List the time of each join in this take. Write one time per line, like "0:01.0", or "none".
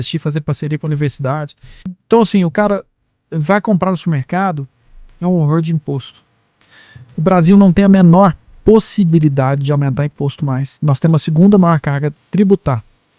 0:01.9